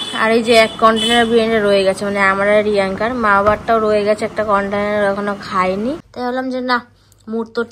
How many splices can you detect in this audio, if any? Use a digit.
1